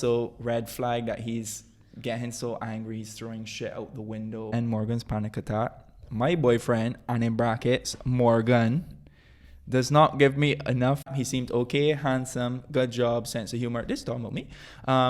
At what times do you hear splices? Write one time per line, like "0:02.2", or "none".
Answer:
0:04.5
0:11.1